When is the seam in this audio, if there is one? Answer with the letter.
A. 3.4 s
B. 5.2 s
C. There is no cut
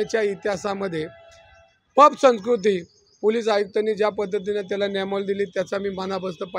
C